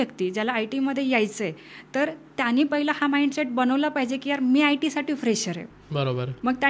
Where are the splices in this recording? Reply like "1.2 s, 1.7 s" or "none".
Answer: none